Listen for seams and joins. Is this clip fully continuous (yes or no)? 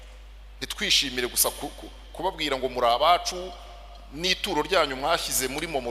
yes